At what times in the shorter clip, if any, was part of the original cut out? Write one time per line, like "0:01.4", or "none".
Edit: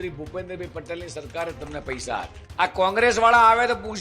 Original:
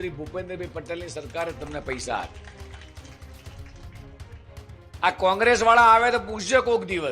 0:02.4

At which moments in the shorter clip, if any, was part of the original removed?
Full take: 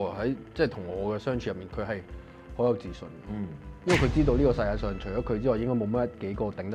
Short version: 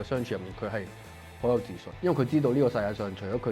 0:01.8

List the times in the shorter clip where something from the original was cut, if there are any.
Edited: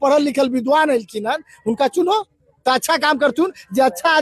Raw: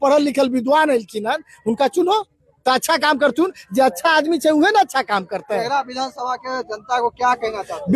none

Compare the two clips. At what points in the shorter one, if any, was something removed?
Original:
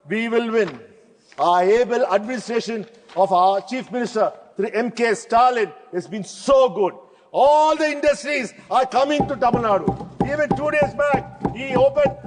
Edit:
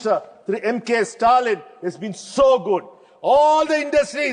none

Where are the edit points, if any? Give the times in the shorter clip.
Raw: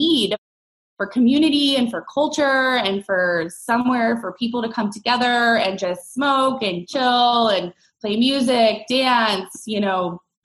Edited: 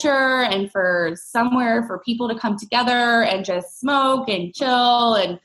none

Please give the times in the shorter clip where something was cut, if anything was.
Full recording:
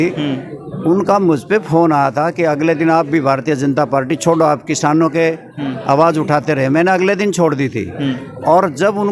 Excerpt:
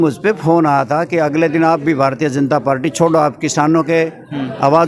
none

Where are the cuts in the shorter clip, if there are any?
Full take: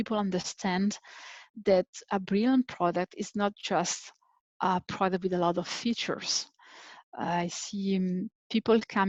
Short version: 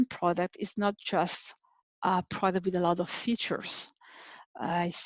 none

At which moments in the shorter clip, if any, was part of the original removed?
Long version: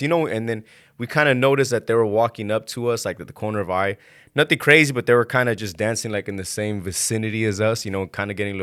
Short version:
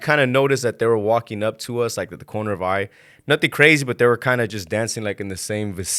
none

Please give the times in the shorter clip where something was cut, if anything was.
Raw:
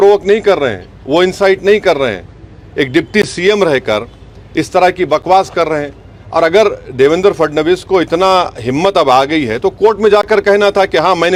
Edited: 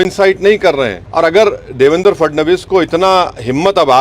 0:01.0

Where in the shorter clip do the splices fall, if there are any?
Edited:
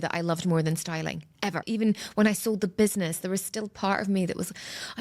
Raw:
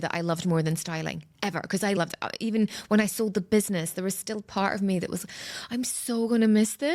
0:01.6

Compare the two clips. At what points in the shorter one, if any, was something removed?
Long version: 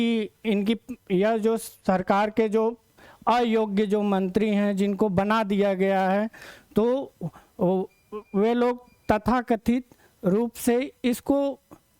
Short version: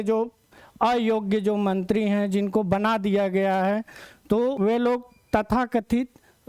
0:04.6

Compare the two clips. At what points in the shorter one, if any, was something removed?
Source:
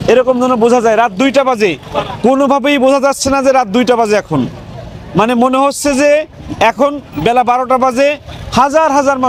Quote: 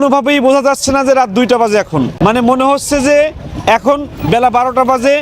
0:02.1

